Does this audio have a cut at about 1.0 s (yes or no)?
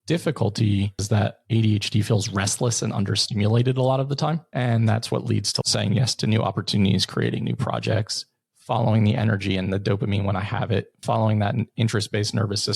yes